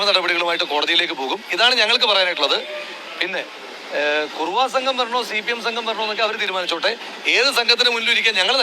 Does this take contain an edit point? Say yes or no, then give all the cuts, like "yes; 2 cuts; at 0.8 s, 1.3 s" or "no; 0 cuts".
no; 0 cuts